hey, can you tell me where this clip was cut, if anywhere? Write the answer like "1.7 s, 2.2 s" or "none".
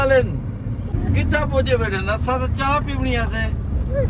0.9 s